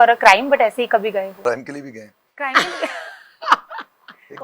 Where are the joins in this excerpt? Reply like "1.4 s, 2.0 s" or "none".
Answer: 1.3 s